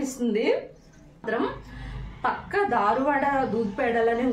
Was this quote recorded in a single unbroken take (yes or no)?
no